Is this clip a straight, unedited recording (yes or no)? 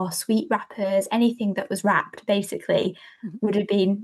yes